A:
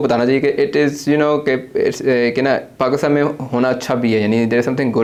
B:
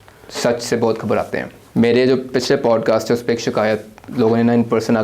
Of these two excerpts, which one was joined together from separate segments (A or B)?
B